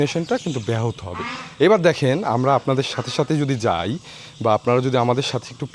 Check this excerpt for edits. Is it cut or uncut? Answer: uncut